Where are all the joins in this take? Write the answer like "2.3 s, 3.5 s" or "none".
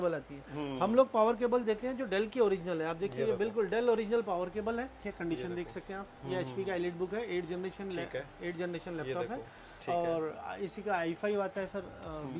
5.0 s